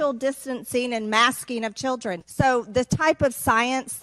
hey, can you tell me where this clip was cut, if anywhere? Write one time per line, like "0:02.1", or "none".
0:02.2